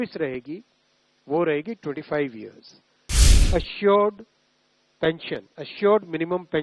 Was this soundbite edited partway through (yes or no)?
yes